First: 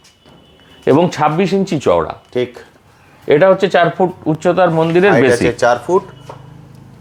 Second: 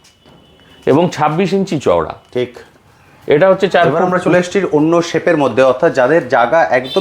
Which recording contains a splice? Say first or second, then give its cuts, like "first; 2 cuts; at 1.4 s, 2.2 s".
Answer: second; 1 cut; at 4.0 s